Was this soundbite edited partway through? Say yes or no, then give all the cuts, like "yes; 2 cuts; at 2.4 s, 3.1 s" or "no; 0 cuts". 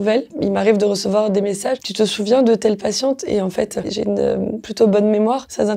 no; 0 cuts